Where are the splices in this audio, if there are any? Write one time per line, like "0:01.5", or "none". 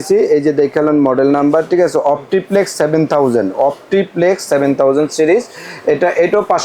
none